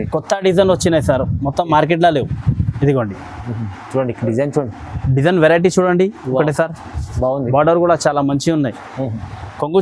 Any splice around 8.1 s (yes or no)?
no